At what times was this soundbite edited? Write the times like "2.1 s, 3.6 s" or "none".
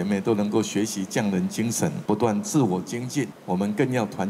2.0 s, 3.4 s